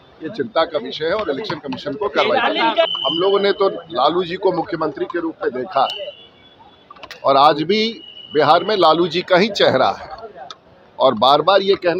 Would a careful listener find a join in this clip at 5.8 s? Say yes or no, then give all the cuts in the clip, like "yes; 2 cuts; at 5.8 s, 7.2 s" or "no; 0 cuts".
no; 1 cut; at 2.9 s